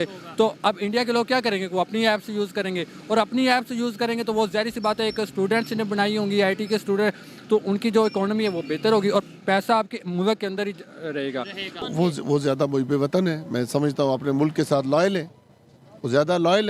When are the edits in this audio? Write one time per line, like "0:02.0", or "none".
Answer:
0:11.8